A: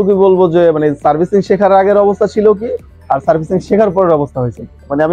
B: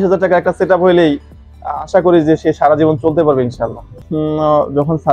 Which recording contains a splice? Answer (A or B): B